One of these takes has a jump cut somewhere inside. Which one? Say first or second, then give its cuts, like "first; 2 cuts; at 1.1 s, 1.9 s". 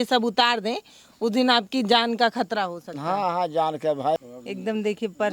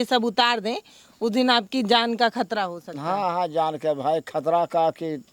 first; 1 cut; at 4.3 s